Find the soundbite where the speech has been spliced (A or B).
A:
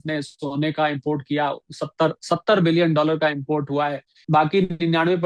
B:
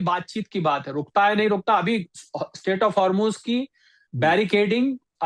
A